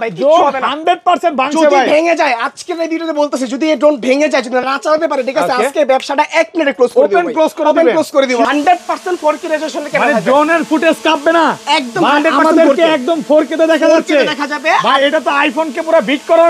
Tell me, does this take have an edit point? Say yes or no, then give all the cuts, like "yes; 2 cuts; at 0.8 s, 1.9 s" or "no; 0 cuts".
yes; 1 cut; at 8.4 s